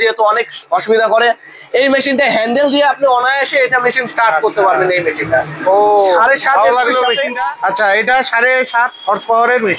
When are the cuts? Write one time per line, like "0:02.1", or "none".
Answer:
none